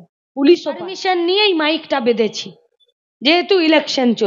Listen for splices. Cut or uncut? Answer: cut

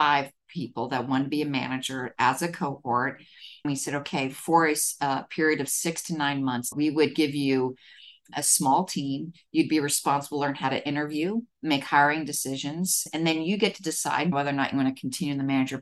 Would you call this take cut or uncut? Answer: cut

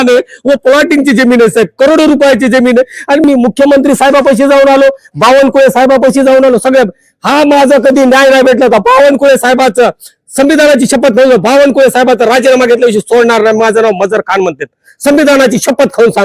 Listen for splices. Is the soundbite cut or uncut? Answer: cut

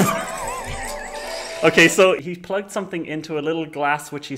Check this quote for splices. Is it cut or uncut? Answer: cut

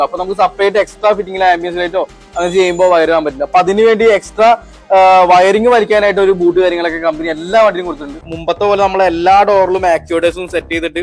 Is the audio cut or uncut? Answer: cut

